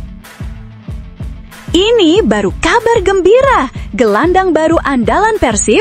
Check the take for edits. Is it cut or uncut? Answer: cut